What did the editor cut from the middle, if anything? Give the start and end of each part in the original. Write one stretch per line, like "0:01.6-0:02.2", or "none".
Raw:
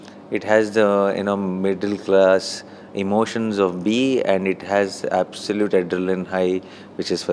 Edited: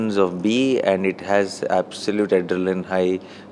none